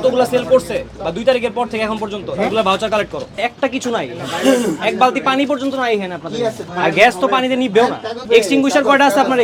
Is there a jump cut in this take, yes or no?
no